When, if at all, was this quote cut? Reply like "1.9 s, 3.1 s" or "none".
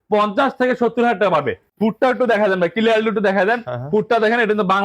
1.6 s

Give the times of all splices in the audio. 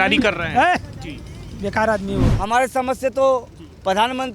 2.3 s

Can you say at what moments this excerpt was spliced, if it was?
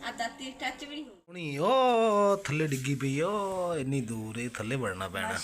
1.5 s

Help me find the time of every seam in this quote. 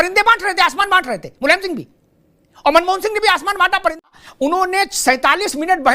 4.1 s

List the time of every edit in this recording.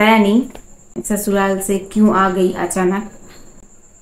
1.0 s

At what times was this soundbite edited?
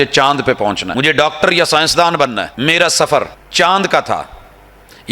0.8 s, 2.5 s, 3.4 s

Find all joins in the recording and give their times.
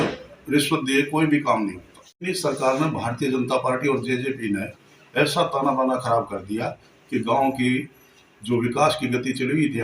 2.2 s

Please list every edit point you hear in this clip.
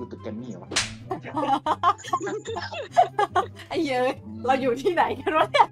3.6 s

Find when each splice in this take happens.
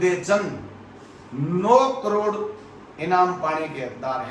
none

